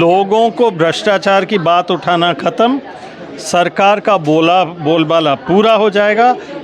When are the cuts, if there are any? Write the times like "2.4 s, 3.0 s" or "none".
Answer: none